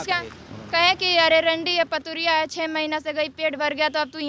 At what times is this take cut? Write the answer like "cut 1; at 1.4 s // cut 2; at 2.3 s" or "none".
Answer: none